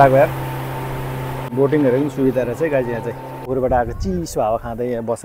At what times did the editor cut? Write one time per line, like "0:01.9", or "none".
0:01.4
0:03.5